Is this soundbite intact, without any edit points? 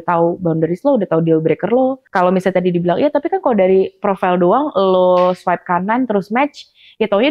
no; 1 cut; at 2.0 s

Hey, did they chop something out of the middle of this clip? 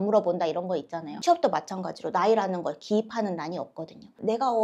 yes; 1 cut; at 1.2 s

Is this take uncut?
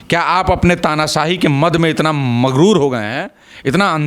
yes; 0 cuts

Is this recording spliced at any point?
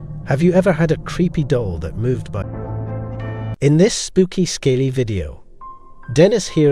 yes; 1 cut; at 2.4 s

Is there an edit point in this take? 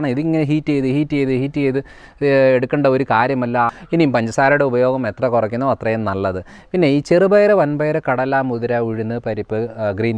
yes; 1 cut; at 3.8 s

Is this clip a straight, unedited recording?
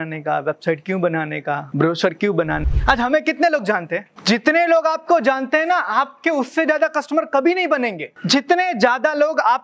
no; 4 cuts; at 1.7 s, 2.6 s, 4.1 s, 8.1 s

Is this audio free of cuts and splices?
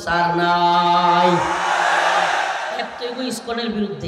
no; 1 cut; at 2.9 s

